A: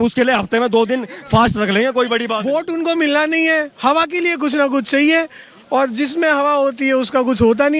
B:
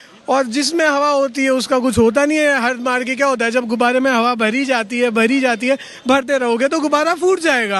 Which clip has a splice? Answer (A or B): A